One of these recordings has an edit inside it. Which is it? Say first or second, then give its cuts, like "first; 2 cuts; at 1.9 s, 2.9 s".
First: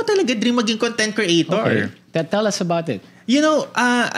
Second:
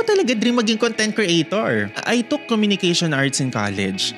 second; 1 cut; at 2.0 s